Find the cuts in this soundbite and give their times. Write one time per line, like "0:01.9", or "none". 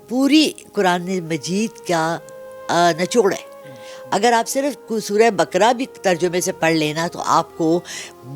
none

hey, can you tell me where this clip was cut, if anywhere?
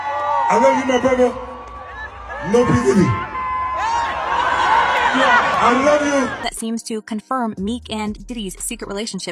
0:06.4

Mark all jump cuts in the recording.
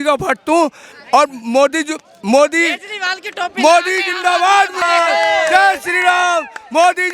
0:04.8

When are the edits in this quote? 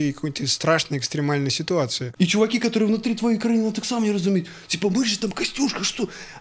0:02.0

